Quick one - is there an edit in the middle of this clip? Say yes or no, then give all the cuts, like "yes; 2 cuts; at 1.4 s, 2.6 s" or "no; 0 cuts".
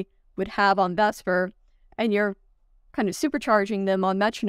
no; 0 cuts